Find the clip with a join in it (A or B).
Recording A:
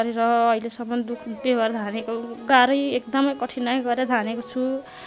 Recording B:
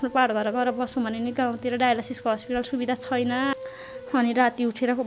B